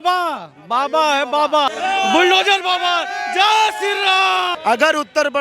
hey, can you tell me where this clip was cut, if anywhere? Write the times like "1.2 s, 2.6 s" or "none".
1.7 s, 4.5 s